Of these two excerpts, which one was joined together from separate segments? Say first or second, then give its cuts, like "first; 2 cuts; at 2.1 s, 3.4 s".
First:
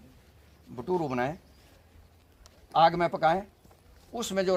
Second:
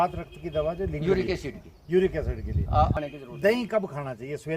second; 1 cut; at 2.9 s